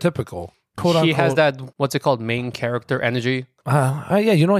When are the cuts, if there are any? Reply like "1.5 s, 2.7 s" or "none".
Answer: 3.5 s